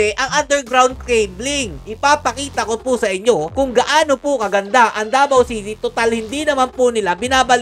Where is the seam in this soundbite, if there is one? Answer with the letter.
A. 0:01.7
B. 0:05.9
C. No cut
A